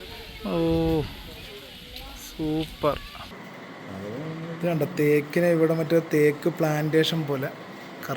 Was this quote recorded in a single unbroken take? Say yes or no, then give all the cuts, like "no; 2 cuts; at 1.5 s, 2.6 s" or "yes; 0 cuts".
no; 1 cut; at 3.3 s